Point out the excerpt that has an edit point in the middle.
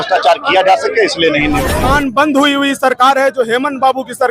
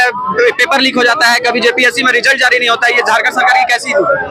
first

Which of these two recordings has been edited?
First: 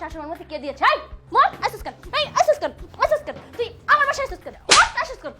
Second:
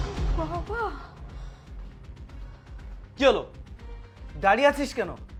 first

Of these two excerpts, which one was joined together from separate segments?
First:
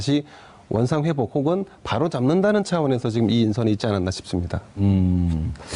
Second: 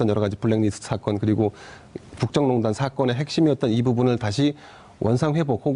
second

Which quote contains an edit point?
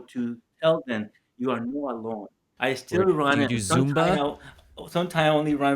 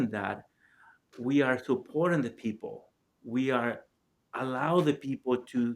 first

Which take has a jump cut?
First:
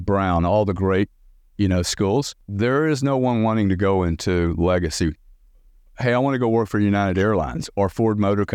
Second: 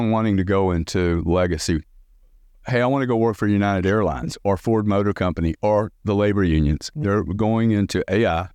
first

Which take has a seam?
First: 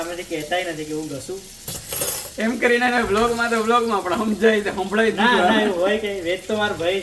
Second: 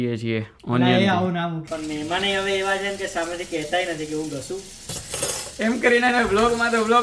second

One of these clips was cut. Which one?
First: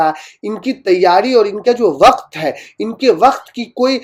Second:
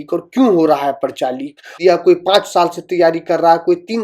second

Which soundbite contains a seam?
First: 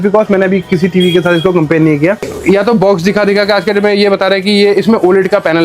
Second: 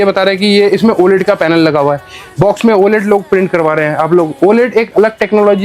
first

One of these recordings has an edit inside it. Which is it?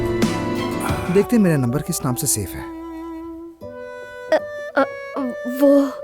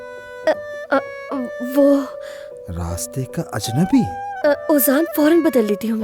first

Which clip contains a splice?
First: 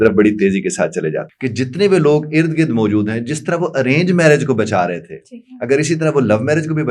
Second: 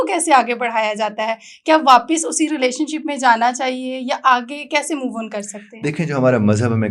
first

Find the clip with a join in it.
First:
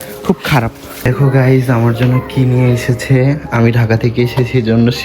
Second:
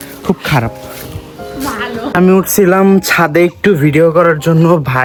first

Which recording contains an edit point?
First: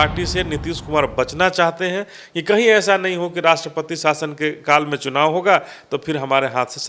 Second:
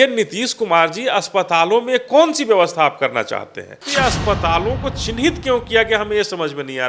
second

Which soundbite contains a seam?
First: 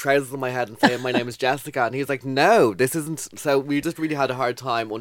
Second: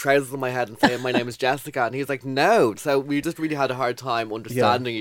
second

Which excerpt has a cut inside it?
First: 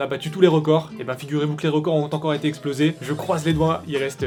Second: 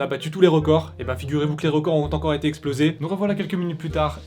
second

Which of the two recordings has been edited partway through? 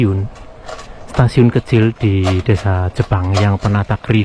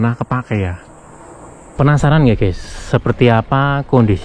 second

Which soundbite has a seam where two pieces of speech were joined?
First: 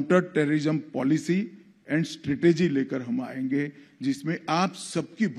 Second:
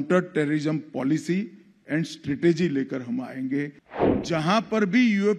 second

